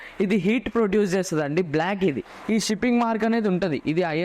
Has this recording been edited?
yes; 1 cut; at 2.3 s

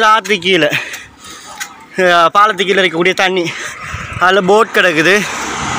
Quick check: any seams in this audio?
no; 0 cuts

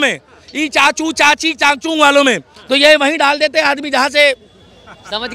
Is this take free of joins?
yes; 0 cuts

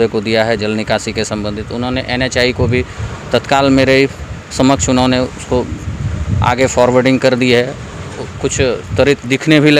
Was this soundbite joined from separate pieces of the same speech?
no; 0 cuts

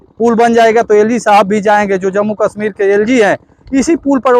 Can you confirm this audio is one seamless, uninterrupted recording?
yes; 0 cuts

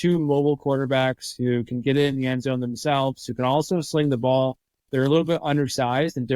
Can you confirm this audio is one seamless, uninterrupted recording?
yes; 0 cuts

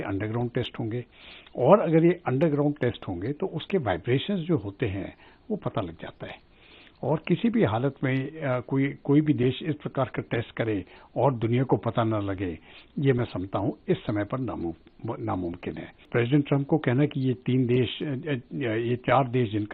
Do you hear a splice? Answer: yes; 1 cut; at 16.1 s

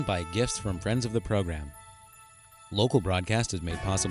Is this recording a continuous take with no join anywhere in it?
yes; 0 cuts

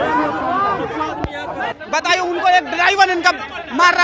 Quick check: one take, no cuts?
no; 1 cut; at 1.7 s

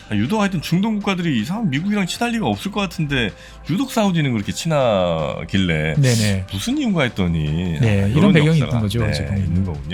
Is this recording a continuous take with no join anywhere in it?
yes; 0 cuts

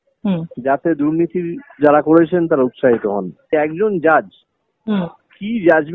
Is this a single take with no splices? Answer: no; 1 cut; at 3.5 s

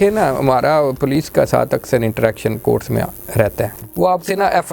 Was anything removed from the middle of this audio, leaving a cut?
yes; 1 cut; at 3.8 s

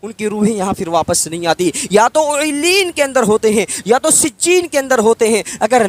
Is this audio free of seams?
yes; 0 cuts

